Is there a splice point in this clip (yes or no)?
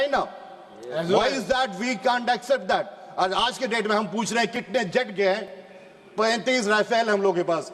no